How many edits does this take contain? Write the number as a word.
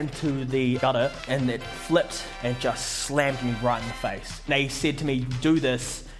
three